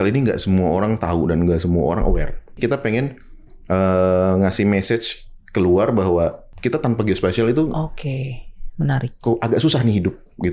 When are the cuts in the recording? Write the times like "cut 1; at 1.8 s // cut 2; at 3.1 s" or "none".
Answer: cut 1; at 2.6 s // cut 2; at 6.5 s